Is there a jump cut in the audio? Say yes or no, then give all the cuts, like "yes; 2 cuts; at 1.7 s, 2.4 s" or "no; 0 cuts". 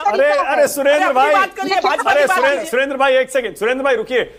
no; 0 cuts